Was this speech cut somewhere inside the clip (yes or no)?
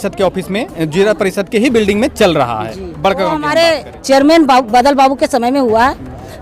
yes